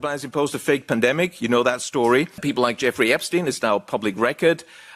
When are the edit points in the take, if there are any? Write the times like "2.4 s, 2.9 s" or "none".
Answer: 2.4 s